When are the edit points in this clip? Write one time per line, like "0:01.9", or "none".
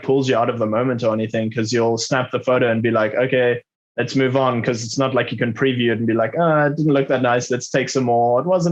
none